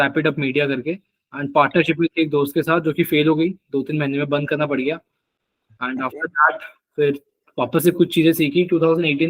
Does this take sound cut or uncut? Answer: uncut